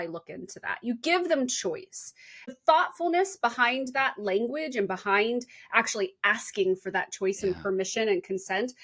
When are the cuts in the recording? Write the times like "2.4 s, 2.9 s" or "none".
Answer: 2.5 s

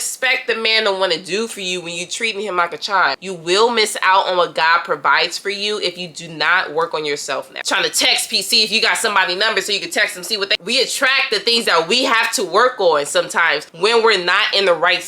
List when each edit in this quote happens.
3.2 s, 7.7 s, 10.5 s

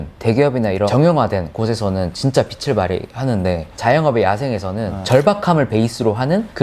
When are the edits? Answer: none

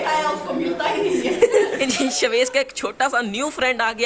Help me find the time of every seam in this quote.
1.8 s

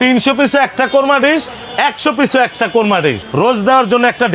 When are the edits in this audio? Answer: 3.2 s

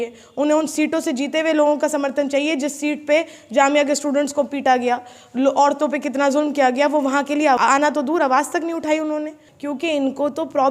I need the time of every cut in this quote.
7.6 s, 9.5 s

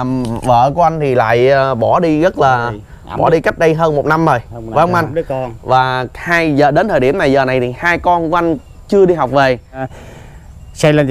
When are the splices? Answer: 9.9 s

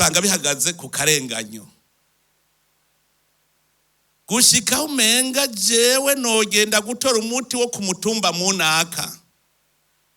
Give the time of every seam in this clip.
none

